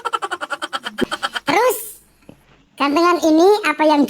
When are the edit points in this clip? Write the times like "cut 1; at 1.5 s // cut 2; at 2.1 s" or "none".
cut 1; at 1.0 s